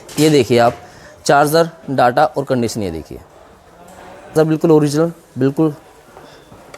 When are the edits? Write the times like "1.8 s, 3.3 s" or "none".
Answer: 4.3 s